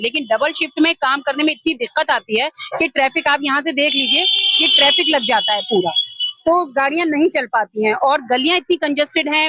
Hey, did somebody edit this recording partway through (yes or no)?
no